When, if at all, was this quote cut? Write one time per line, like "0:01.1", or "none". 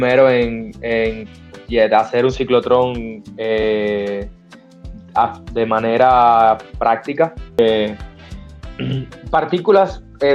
none